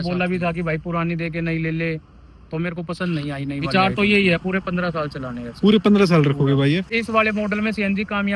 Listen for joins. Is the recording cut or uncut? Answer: cut